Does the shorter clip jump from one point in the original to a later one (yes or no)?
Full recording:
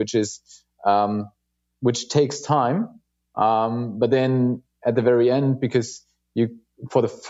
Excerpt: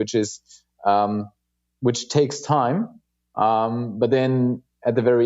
no